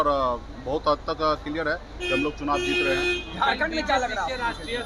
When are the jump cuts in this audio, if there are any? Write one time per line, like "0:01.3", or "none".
none